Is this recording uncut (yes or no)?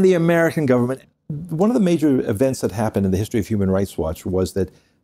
no